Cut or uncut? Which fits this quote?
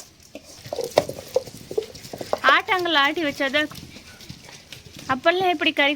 cut